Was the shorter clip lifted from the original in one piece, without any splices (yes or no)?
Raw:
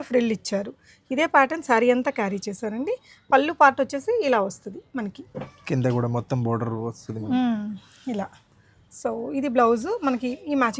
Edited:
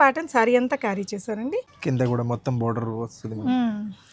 no